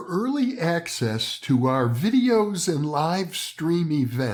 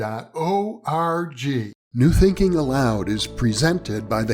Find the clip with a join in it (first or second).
second